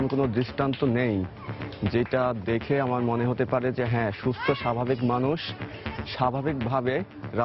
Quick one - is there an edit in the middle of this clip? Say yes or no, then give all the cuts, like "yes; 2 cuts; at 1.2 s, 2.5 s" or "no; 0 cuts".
no; 0 cuts